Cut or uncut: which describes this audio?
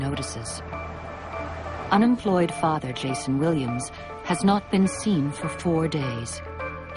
cut